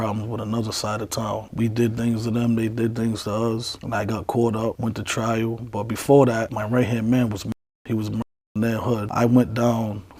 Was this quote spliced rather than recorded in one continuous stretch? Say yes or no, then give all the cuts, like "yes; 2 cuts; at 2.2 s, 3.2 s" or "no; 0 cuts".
no; 0 cuts